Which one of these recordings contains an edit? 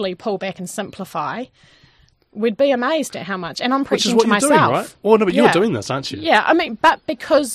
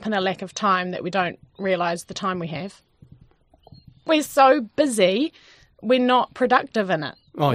second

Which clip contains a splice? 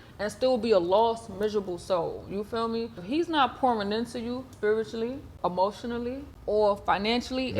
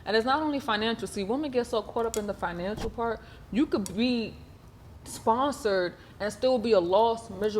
first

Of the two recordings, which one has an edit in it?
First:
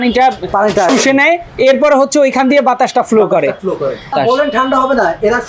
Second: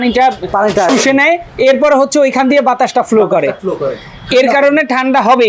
first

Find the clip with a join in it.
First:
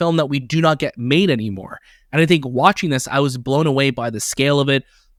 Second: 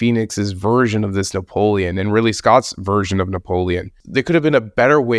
second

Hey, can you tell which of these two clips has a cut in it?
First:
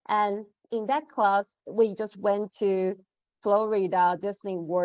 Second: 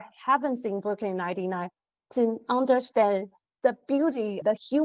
first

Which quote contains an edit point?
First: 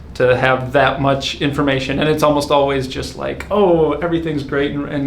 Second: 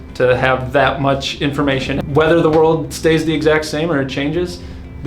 second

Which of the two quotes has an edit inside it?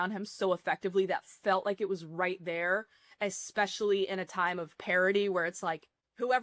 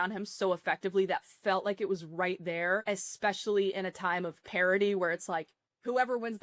second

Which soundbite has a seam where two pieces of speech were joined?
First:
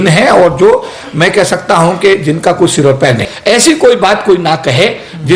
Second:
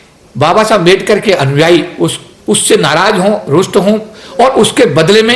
first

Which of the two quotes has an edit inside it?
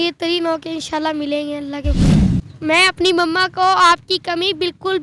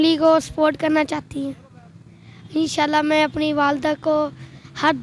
first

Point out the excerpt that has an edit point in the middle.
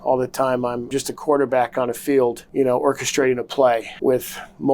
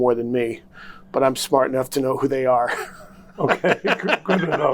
first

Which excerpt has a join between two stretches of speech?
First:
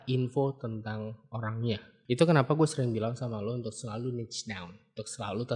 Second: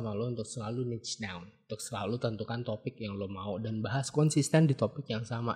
first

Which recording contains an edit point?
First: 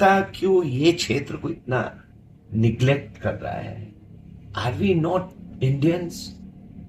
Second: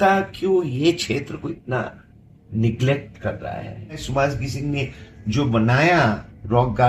second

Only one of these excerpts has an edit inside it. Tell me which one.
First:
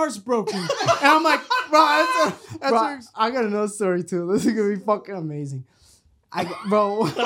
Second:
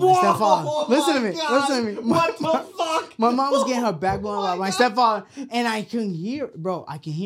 first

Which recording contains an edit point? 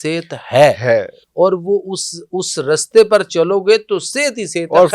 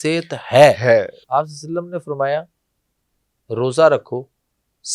second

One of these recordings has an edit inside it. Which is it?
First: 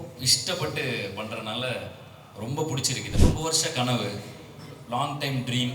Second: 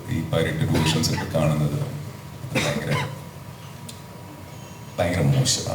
first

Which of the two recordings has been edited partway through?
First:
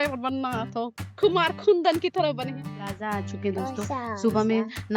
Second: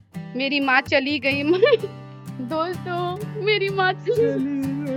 first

